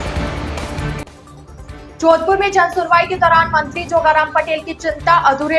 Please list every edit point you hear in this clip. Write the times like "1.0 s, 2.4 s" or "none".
none